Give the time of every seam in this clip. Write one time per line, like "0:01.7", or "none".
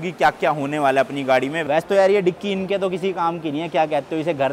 0:01.6

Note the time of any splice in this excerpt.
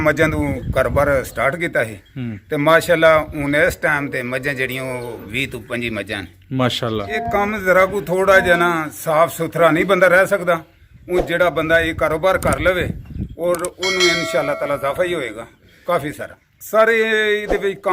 0:07.1
0:16.4

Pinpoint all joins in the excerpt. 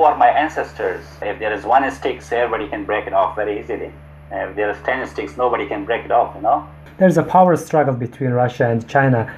0:01.3
0:06.8

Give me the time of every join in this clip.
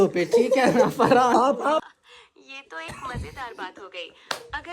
0:01.8

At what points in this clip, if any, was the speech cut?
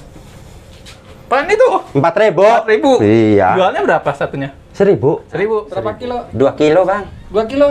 0:05.5

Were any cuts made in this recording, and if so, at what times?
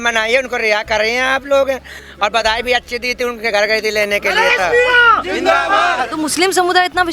0:02.0
0:06.1

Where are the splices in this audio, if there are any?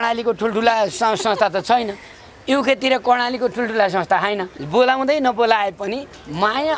0:04.5

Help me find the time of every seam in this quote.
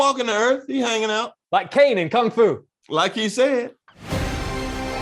0:03.8

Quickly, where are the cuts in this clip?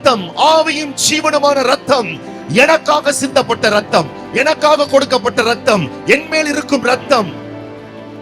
0:07.3

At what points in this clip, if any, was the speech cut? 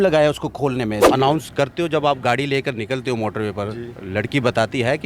0:01.0

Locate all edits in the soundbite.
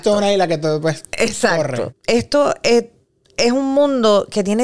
0:01.9

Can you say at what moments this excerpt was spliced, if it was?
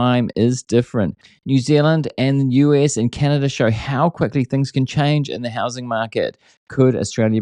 none

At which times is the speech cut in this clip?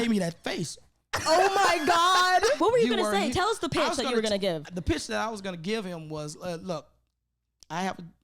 0:02.6

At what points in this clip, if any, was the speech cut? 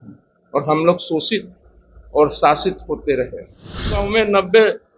0:04.0

